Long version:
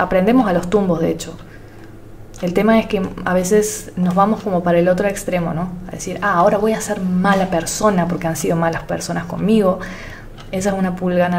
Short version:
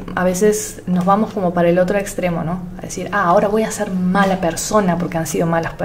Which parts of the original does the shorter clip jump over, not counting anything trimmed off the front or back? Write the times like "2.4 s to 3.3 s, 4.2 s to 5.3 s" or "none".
none